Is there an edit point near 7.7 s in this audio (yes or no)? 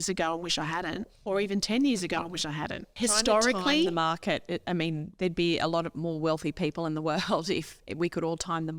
no